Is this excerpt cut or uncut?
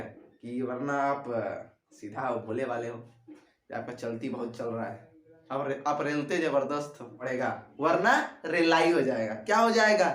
cut